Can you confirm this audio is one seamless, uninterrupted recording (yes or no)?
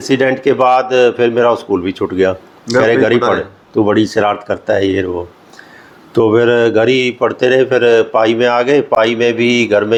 yes